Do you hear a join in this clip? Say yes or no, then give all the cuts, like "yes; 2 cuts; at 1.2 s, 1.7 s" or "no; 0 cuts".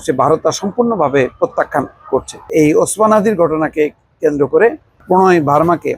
yes; 1 cut; at 2.4 s